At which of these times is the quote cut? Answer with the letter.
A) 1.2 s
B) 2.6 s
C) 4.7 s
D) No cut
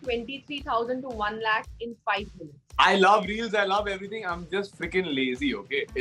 B